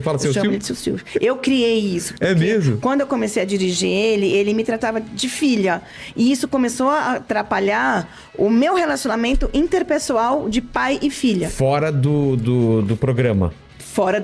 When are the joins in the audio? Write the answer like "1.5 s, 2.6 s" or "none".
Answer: none